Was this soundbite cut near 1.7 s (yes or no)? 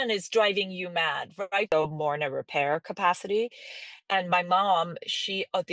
yes